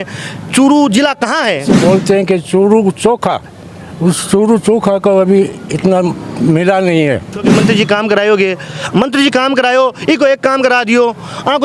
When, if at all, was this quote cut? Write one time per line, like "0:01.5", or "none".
0:01.7
0:07.5